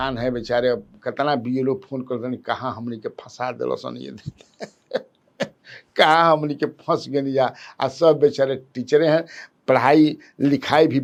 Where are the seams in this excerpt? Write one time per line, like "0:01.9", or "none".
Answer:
none